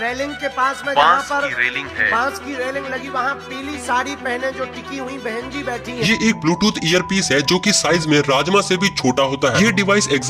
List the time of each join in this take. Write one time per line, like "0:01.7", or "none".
0:06.0
0:09.5